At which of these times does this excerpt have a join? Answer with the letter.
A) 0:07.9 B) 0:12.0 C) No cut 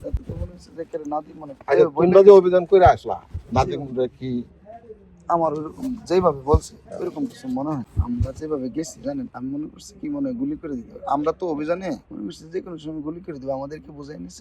A